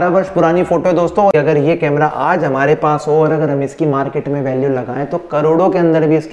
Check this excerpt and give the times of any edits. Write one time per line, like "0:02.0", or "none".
0:01.3